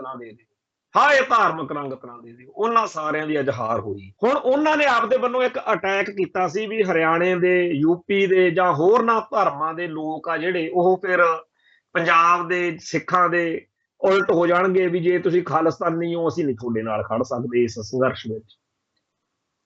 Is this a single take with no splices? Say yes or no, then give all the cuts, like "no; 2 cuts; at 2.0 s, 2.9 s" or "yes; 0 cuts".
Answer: no; 1 cut; at 4.0 s